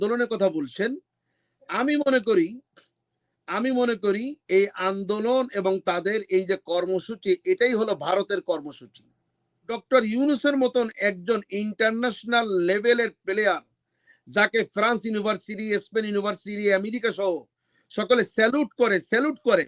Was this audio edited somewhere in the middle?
yes; 1 cut; at 9.8 s

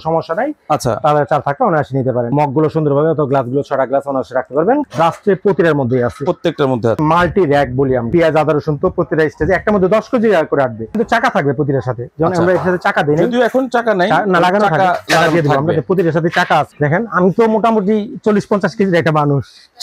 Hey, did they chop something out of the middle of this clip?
yes; 6 cuts; at 2.3 s, 4.9 s, 7.0 s, 8.1 s, 11.0 s, 16.7 s

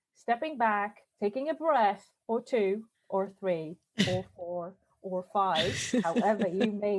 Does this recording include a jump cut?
no; 0 cuts

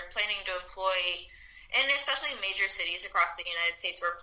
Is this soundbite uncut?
yes; 0 cuts

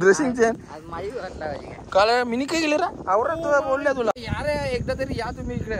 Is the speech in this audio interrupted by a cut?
yes; 1 cut; at 4.1 s

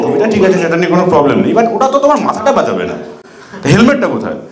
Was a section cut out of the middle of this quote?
no; 0 cuts

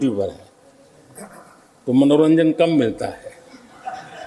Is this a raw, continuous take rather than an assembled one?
yes; 0 cuts

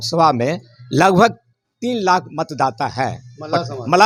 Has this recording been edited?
no; 0 cuts

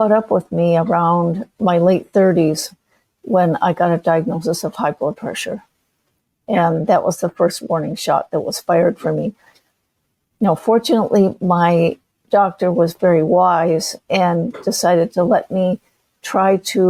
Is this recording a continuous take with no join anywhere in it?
yes; 0 cuts

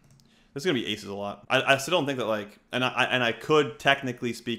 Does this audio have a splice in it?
yes; 1 cut; at 1.4 s

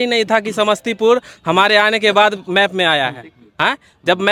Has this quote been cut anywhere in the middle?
no; 0 cuts

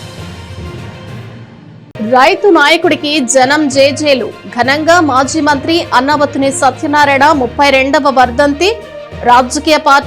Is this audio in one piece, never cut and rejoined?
no; 1 cut; at 1.3 s

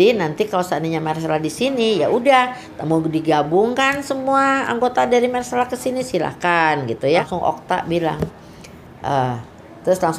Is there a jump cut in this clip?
yes; 1 cut; at 7.3 s

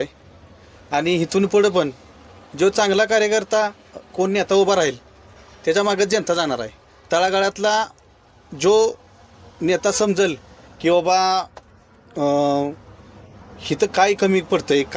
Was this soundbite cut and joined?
no; 0 cuts

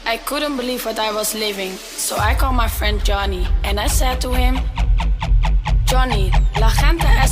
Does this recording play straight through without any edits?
yes; 0 cuts

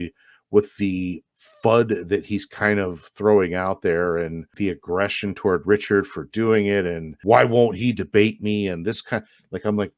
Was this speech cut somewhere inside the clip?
yes; 2 cuts; at 4.5 s, 7.1 s

